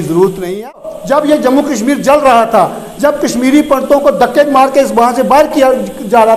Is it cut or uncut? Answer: cut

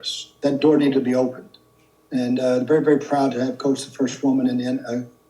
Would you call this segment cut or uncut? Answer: uncut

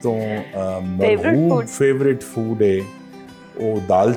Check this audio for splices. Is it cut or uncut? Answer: uncut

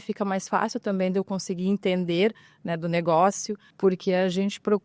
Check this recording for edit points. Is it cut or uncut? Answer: cut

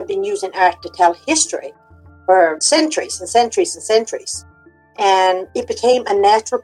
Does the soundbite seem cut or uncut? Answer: cut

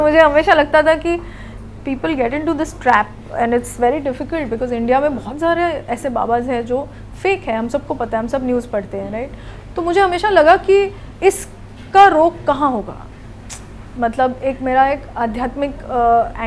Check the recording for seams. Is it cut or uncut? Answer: uncut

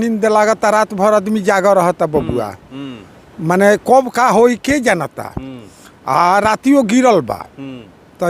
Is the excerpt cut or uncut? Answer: uncut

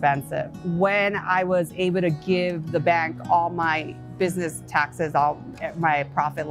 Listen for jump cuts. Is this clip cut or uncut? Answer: uncut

